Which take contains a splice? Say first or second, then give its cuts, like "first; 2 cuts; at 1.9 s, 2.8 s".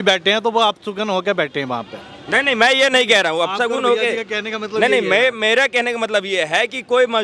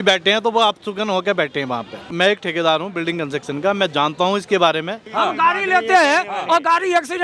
second; 2 cuts; at 2.1 s, 5.0 s